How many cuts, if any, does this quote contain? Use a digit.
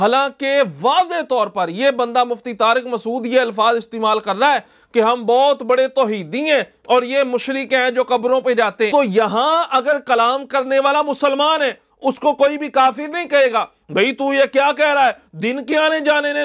1